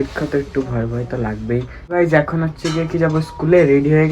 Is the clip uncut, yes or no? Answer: no